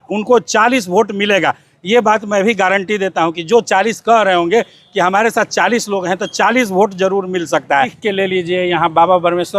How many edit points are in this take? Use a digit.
1